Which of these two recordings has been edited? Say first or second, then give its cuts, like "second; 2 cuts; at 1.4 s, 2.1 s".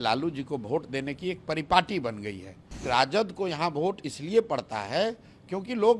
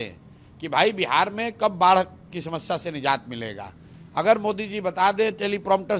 first; 1 cut; at 2.9 s